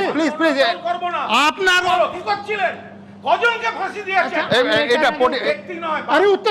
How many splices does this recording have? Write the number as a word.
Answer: two